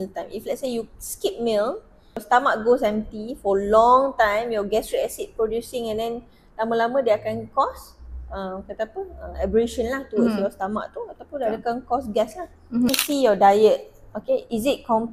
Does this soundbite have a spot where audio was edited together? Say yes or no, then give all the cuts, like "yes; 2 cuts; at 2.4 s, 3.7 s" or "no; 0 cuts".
yes; 2 cuts; at 2.2 s, 12.9 s